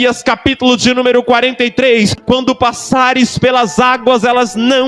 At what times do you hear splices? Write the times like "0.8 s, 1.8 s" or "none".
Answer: 2.2 s